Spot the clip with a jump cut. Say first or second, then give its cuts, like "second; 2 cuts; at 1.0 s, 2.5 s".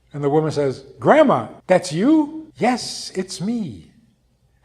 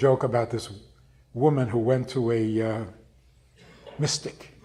first; 2 cuts; at 1.5 s, 2.4 s